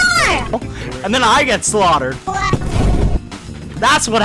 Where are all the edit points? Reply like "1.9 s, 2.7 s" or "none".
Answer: 2.2 s